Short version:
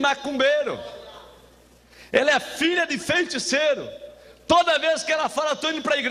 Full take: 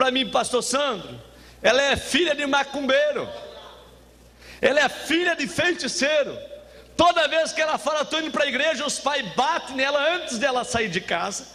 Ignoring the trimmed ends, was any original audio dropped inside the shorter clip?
no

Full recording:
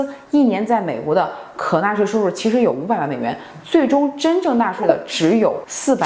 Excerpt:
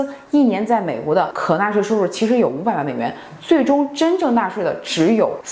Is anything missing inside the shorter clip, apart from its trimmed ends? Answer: yes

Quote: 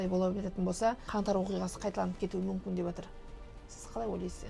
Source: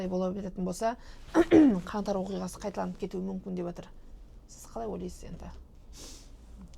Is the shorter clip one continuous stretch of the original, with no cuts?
no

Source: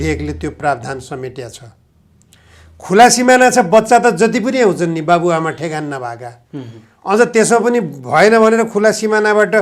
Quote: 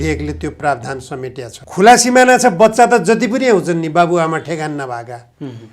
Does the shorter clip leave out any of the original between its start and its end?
yes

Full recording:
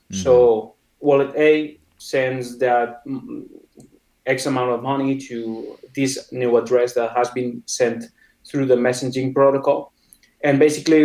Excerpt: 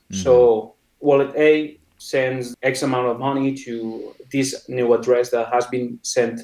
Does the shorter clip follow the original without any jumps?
no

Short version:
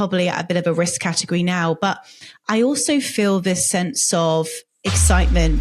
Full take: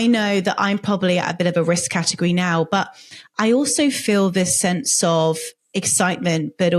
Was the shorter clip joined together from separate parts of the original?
no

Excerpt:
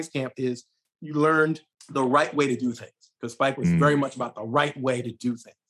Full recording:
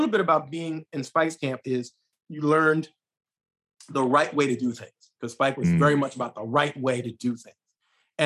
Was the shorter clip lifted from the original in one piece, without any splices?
no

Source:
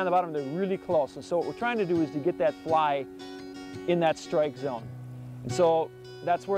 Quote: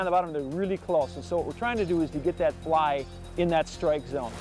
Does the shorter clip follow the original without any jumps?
no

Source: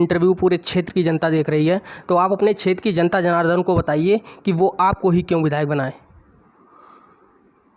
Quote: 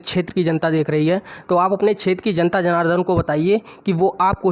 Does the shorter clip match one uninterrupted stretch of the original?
yes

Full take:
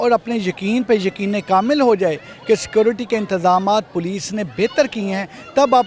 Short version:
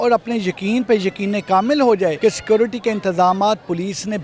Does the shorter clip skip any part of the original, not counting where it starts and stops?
yes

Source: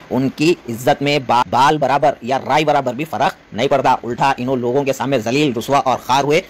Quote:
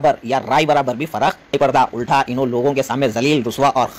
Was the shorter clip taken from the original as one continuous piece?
no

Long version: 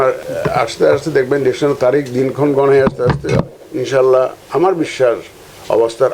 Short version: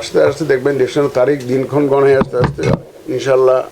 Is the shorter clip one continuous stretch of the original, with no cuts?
yes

